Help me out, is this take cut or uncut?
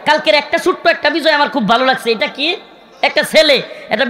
uncut